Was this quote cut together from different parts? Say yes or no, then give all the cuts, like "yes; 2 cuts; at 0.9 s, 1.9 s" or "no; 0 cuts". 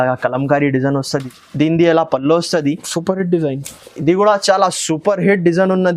yes; 1 cut; at 1.3 s